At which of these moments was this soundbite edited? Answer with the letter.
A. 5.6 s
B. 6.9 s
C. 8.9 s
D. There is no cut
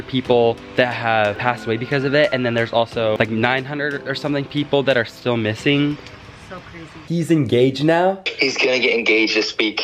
B